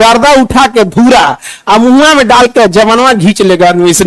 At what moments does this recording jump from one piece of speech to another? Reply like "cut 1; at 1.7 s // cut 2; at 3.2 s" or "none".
none